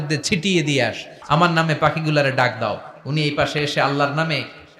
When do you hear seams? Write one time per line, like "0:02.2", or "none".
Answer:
0:01.1